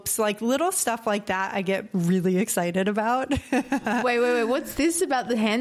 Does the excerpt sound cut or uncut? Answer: cut